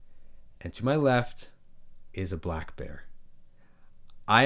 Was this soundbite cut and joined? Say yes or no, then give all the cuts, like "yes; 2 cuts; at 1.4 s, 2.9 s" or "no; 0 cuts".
no; 0 cuts